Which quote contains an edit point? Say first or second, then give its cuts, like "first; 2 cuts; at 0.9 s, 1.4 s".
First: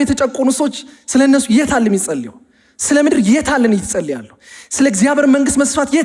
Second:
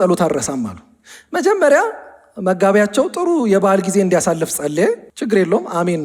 second; 1 cut; at 5.1 s